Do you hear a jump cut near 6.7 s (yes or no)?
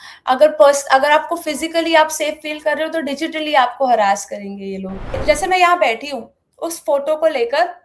no